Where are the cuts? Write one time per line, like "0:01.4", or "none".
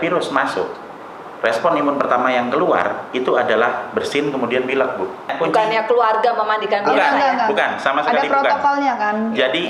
0:05.3